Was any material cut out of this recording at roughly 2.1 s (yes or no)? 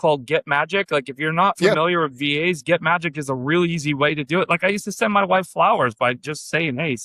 no